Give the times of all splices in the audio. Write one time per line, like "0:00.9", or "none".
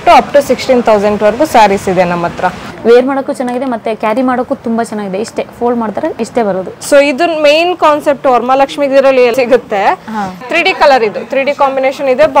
0:02.6
0:06.7
0:09.3